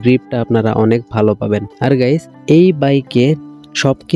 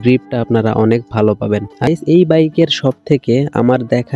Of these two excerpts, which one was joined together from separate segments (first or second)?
second